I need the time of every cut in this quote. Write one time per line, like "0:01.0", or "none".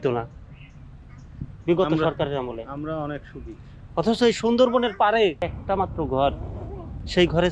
0:05.5